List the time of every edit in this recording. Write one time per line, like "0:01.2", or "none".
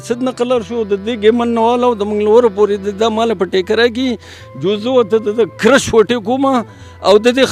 none

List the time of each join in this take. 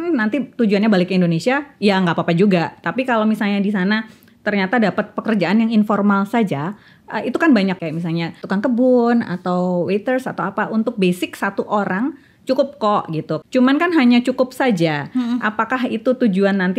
0:07.9
0:13.4

